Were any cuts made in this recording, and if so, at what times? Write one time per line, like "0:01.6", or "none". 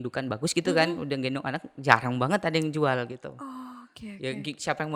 none